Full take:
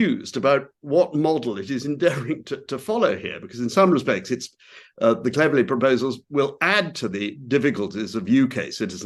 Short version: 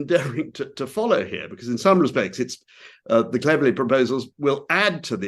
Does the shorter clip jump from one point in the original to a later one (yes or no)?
no